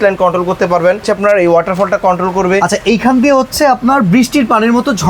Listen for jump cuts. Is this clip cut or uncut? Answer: cut